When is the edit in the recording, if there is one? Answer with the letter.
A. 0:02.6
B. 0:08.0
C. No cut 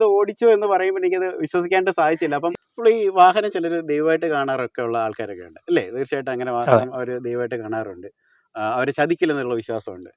A